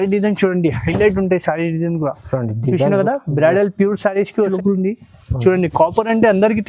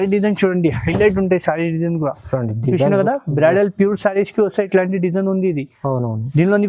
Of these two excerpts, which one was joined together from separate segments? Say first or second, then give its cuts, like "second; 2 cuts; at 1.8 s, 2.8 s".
first; 1 cut; at 4.5 s